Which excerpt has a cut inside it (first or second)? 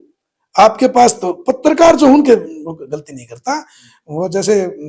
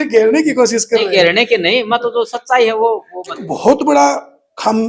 second